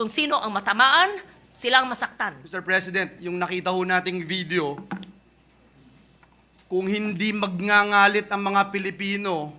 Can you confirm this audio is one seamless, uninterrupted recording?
no; 1 cut; at 2.4 s

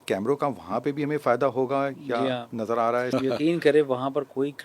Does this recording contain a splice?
yes; 1 cut; at 3.1 s

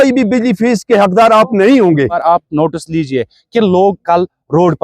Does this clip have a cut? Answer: yes; 1 cut; at 2.2 s

